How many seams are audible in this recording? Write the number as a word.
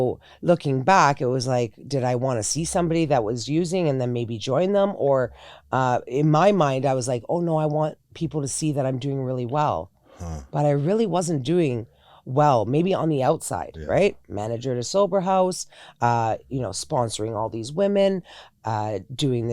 zero